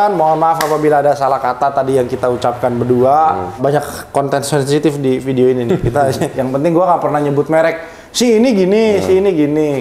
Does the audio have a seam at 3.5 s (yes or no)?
yes